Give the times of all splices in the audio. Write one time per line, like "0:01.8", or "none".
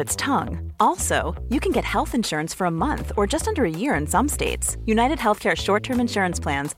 none

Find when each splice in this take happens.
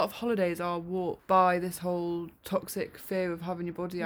none

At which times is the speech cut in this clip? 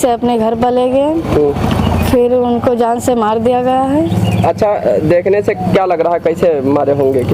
none

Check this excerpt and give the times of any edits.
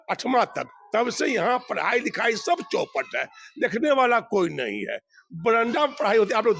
none

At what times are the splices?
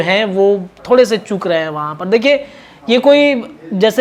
none

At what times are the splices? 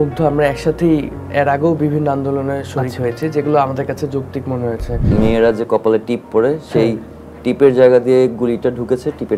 0:05.1

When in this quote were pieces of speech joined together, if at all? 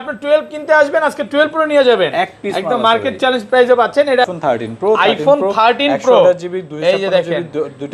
0:04.3

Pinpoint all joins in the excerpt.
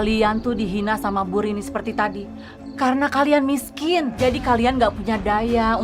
none

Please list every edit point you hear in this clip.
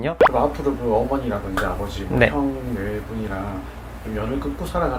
none

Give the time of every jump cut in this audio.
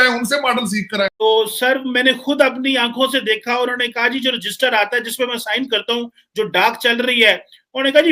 0:01.2

